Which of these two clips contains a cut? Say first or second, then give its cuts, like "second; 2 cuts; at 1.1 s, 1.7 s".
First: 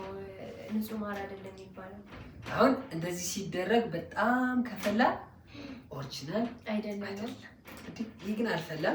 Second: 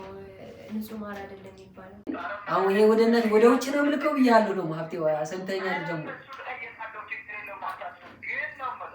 second; 1 cut; at 2.1 s